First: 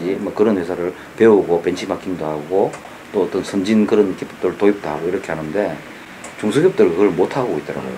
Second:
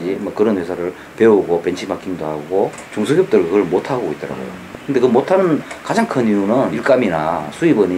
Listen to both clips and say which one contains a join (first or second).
second